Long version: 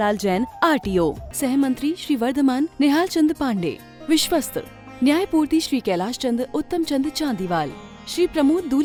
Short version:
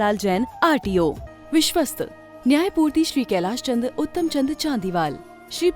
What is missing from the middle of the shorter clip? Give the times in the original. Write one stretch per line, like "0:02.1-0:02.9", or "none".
0:01.3-0:03.8